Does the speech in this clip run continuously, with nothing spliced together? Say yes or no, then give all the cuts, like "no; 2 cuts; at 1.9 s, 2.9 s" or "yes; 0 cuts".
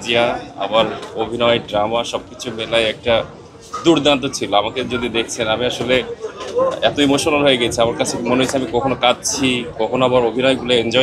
yes; 0 cuts